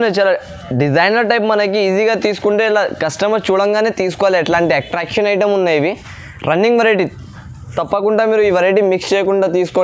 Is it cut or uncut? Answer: uncut